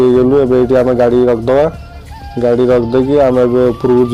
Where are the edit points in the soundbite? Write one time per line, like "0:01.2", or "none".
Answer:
none